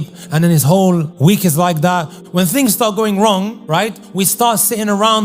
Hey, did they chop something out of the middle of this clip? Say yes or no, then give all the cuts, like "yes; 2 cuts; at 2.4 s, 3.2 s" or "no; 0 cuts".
yes; 3 cuts; at 1.1 s, 2.2 s, 3.9 s